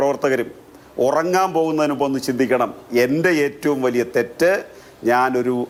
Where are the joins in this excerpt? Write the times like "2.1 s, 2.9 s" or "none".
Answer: none

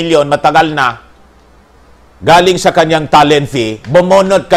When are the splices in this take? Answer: none

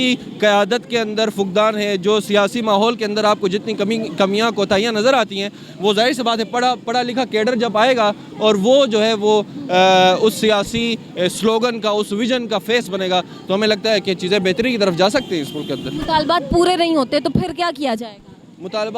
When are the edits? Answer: none

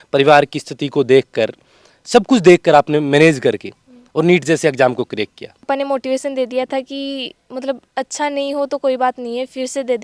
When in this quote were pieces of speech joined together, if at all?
5.7 s

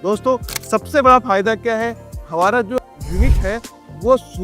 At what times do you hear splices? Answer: 2.8 s

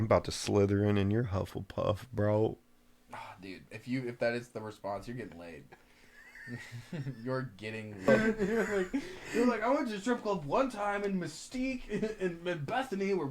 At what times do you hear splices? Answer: 8.1 s

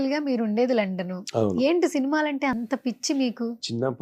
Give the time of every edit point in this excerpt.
none

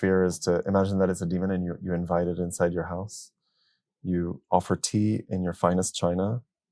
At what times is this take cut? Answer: none

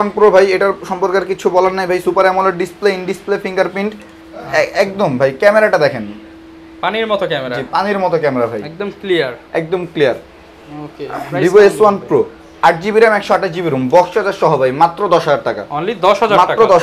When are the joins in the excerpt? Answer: none

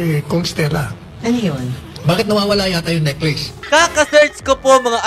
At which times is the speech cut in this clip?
3.5 s

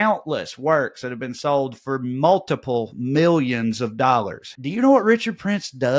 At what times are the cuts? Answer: 4.4 s

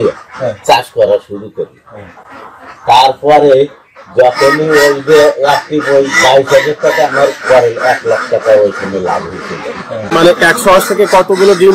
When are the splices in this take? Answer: 10.1 s

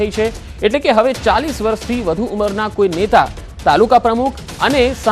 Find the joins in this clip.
3.1 s

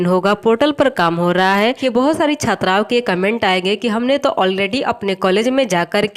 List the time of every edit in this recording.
1.7 s

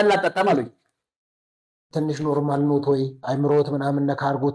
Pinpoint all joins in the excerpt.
1.9 s, 3.2 s

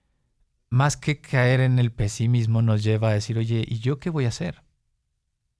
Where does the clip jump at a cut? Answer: none

